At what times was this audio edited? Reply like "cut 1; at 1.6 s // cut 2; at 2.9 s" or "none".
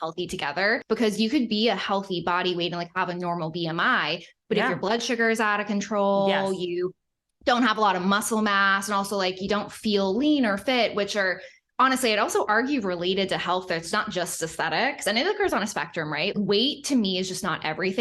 cut 1; at 0.8 s // cut 2; at 16.3 s